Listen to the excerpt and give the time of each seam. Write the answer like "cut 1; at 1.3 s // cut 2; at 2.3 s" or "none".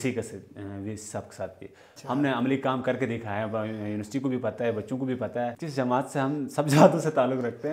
cut 1; at 1.9 s // cut 2; at 5.6 s